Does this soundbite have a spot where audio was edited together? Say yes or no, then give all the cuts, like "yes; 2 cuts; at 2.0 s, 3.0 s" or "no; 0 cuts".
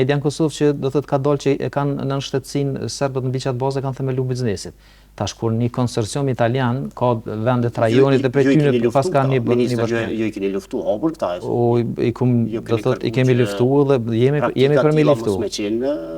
no; 0 cuts